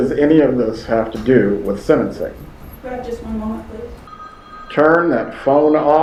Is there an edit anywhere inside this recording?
no; 0 cuts

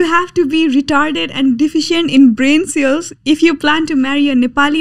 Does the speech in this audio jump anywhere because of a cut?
no; 0 cuts

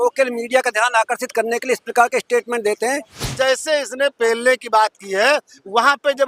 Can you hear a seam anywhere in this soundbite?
yes; 1 cut; at 3.3 s

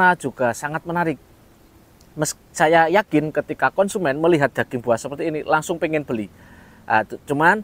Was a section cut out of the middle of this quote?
no; 0 cuts

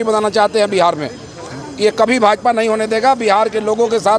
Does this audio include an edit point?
no; 0 cuts

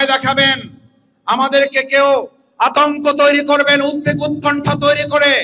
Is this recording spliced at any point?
no; 0 cuts

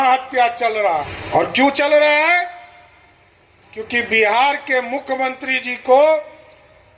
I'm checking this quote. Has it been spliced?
yes; 1 cut; at 1.2 s

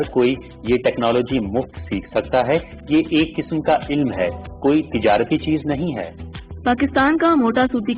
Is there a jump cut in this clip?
yes; 1 cut; at 6.5 s

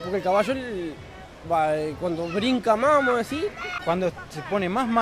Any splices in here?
yes; 1 cut; at 3.7 s

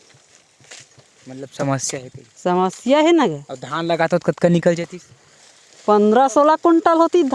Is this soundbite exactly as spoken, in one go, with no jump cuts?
yes; 0 cuts

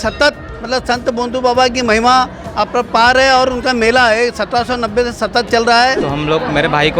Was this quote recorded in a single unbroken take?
no; 1 cut; at 6.0 s

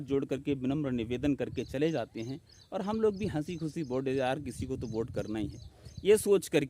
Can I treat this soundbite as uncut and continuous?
yes; 0 cuts

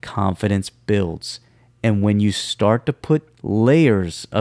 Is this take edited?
yes; 1 cut; at 3.4 s

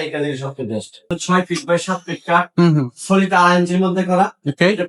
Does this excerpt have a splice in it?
yes; 1 cut; at 1.1 s

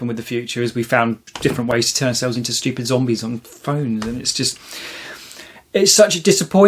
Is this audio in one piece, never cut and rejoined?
no; 1 cut; at 1.3 s

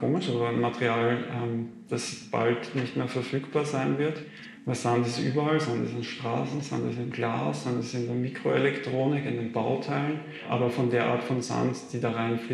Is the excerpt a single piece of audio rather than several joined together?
no; 3 cuts; at 4.3 s, 8.1 s, 10.5 s

